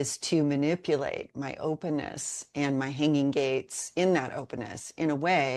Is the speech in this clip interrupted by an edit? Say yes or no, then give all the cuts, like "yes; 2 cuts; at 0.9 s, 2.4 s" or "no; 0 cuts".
no; 0 cuts